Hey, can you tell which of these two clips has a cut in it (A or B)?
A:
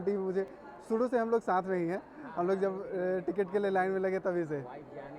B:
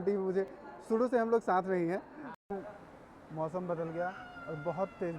B